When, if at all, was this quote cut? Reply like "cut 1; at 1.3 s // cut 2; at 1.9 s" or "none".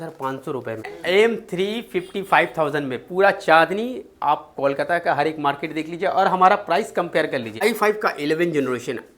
cut 1; at 0.9 s // cut 2; at 7.6 s